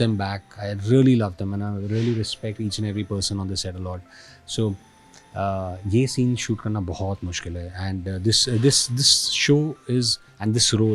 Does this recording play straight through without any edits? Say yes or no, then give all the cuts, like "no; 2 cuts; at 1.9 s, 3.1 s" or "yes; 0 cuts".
yes; 0 cuts